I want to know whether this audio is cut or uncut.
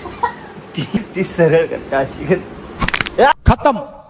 cut